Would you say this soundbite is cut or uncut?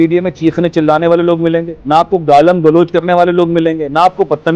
uncut